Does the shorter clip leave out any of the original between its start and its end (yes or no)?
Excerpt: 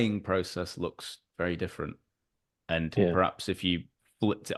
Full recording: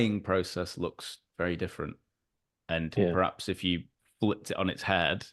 no